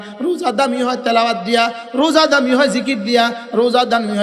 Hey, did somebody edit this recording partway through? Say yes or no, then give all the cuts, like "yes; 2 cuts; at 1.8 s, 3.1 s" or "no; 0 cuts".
no; 0 cuts